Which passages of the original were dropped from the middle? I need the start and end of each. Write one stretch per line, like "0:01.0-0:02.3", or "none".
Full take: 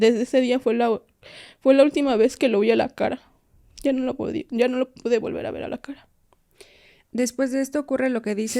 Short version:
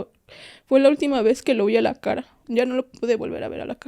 0:03.4-0:04.4